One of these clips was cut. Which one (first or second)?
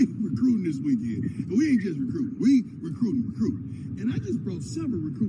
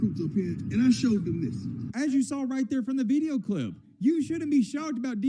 second